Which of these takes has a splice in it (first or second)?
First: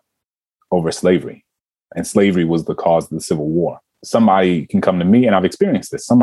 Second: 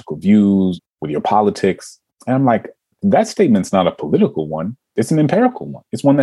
second